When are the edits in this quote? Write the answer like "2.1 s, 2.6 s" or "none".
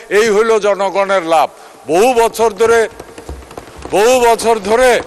none